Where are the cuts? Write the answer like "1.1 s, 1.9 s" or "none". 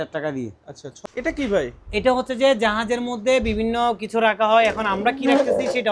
1.0 s